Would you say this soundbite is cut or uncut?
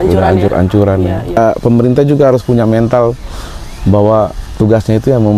cut